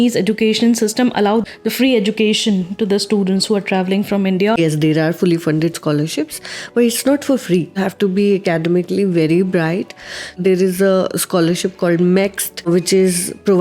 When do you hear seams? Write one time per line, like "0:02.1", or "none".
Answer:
0:01.4
0:04.6
0:07.8
0:10.4
0:12.7